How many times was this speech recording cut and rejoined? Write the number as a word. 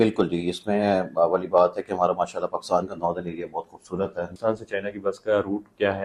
one